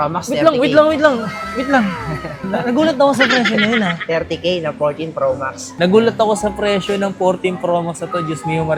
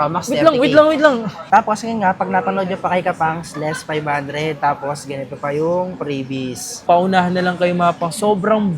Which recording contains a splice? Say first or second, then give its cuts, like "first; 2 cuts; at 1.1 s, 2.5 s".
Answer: second; 2 cuts; at 1.5 s, 6.8 s